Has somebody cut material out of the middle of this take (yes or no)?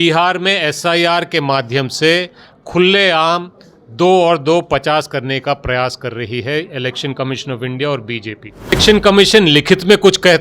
yes